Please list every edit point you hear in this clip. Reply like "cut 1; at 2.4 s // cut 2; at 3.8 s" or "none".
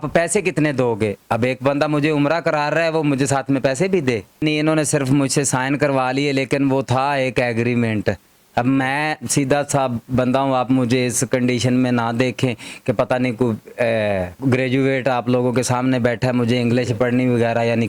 cut 1; at 4.4 s // cut 2; at 14.3 s

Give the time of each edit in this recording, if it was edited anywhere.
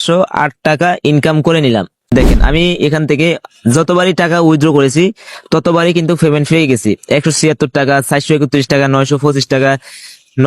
cut 1; at 2.1 s

